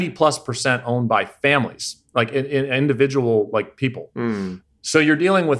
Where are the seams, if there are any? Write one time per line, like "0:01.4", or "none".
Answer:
none